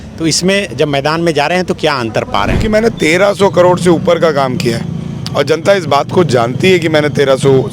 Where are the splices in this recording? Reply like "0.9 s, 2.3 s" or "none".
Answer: 2.6 s